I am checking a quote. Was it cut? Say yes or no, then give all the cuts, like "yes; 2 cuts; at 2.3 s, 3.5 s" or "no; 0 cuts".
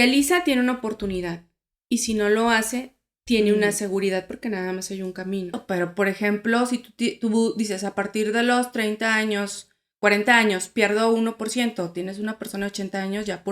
yes; 1 cut; at 5.6 s